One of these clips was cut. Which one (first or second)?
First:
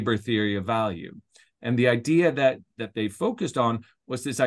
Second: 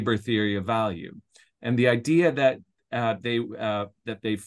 first